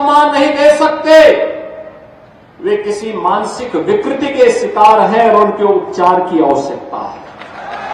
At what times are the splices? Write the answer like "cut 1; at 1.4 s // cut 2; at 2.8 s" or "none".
none

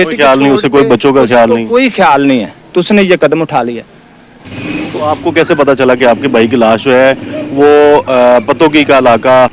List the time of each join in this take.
none

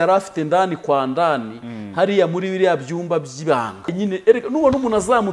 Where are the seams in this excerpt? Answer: cut 1; at 3.9 s

